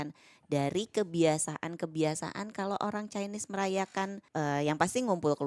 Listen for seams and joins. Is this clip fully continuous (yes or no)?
no